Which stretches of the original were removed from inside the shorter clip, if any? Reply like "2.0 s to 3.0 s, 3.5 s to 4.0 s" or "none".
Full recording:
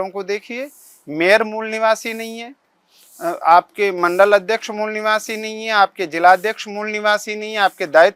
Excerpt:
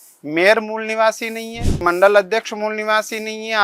2.6 s to 4.0 s